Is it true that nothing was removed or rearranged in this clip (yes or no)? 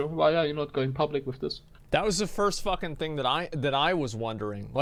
yes